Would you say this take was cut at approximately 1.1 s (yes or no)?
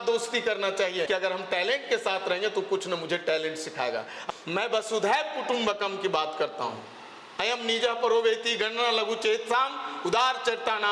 yes